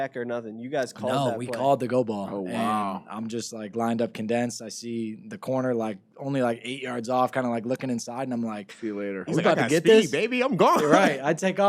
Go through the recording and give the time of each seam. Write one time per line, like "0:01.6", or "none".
none